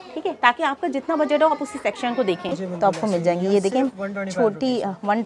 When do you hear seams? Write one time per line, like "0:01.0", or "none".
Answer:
0:02.5